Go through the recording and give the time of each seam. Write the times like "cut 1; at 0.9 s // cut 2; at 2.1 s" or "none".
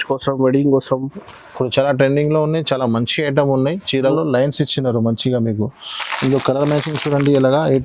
cut 1; at 4.1 s